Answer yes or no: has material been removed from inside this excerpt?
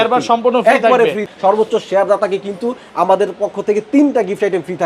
yes